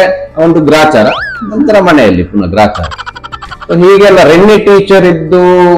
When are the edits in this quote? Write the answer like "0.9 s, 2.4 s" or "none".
none